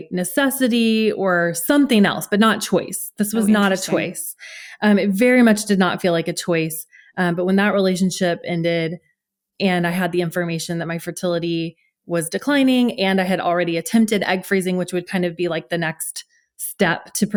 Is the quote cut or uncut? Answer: uncut